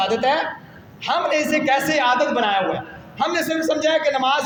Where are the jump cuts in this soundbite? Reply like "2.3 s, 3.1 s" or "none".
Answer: none

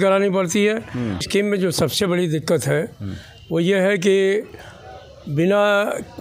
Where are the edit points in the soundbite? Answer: 1.3 s

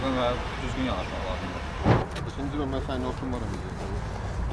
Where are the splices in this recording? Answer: 2.0 s

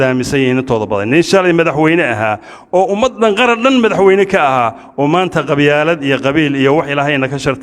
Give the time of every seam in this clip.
none

